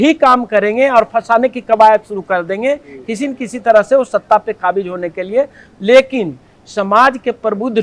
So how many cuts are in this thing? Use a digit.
0